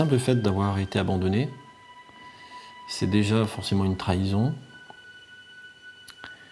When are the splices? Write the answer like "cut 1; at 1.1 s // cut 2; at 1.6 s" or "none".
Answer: cut 1; at 1.7 s // cut 2; at 3.0 s